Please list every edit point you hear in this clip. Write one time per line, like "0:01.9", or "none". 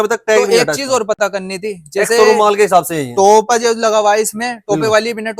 none